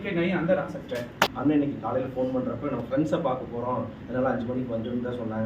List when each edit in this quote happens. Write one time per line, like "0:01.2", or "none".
0:01.3